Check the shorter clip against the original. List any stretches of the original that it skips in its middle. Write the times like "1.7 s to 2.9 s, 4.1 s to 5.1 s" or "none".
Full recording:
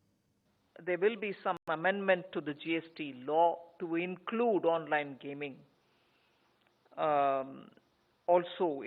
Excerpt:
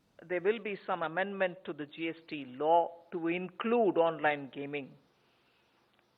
1.6 s to 1.7 s